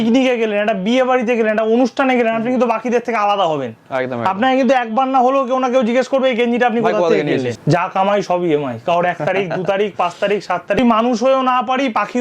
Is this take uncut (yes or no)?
no